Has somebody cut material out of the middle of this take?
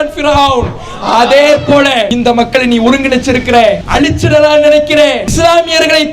yes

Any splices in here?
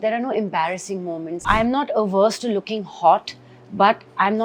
yes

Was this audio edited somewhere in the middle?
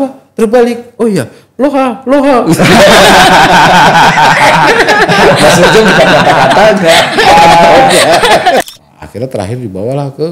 yes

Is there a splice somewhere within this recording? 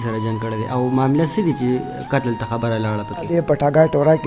yes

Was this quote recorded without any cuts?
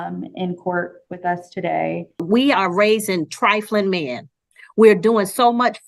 no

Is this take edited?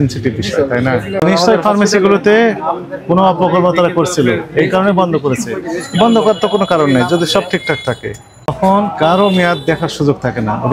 yes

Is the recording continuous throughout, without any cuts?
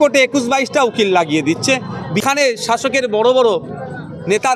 no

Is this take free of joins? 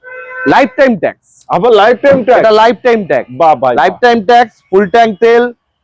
yes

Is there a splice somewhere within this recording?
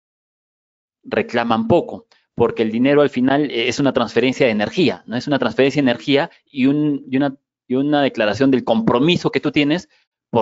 no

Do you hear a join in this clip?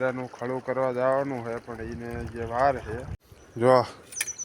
yes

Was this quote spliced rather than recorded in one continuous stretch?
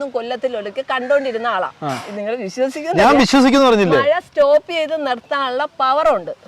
yes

